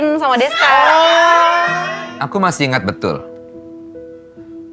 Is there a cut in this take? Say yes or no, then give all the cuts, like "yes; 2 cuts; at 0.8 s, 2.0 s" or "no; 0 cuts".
yes; 1 cut; at 1.8 s